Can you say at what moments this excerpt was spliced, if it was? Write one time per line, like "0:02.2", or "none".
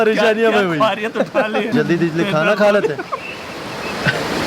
0:01.7

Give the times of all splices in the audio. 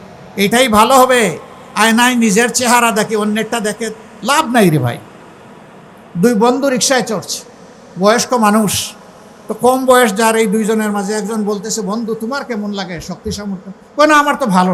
none

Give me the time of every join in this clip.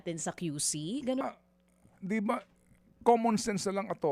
0:01.2

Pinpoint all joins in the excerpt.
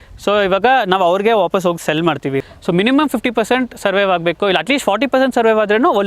0:02.4

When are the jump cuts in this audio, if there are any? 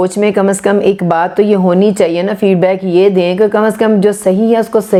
none

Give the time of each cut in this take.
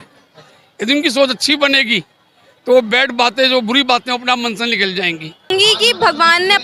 0:05.5

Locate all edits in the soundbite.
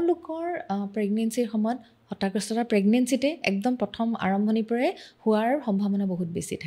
none

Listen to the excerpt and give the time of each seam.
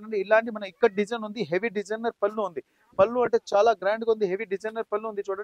none

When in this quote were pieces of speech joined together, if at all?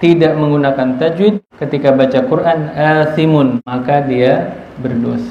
0:01.5
0:03.6

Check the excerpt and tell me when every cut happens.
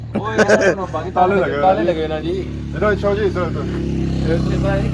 none

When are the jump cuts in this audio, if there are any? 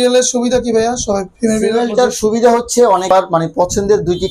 0:03.1

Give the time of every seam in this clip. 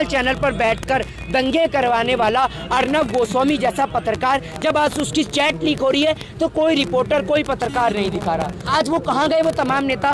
0:08.6

